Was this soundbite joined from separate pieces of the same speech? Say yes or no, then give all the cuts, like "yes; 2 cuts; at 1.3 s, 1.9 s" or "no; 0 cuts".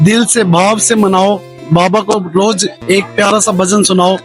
no; 0 cuts